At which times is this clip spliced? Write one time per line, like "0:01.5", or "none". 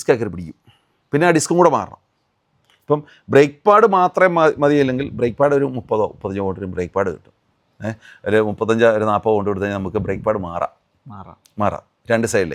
none